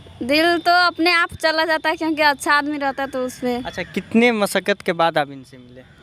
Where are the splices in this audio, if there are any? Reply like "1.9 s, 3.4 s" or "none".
none